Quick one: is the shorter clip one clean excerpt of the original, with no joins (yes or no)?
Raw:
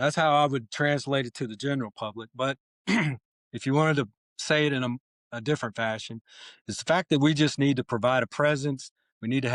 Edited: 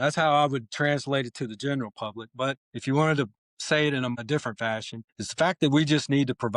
no